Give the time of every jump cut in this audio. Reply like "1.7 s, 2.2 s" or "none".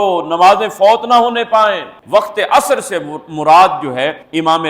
1.9 s